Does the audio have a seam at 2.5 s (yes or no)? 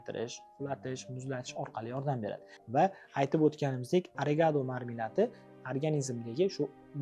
yes